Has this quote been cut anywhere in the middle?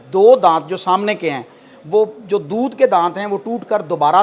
no; 0 cuts

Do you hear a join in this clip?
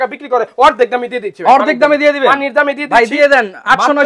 no; 0 cuts

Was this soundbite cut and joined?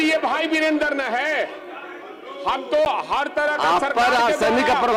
no; 0 cuts

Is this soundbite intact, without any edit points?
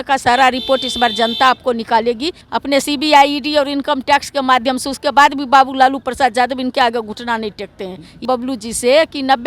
no; 2 cuts; at 2.4 s, 8.2 s

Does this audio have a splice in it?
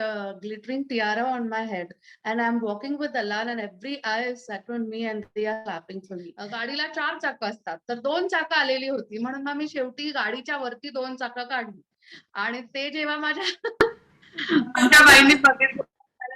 yes; 1 cut; at 6.4 s

